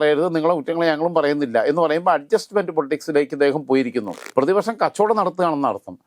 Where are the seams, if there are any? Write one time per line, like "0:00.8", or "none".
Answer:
0:04.2